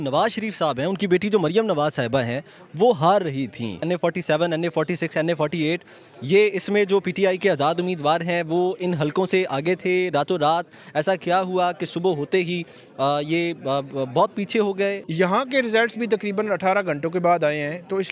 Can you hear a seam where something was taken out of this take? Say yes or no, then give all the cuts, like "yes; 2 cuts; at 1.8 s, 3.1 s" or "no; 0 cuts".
yes; 2 cuts; at 3.8 s, 15.0 s